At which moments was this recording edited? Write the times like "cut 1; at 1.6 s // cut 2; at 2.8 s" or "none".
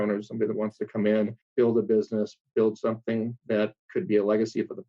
cut 1; at 1.4 s // cut 2; at 3.8 s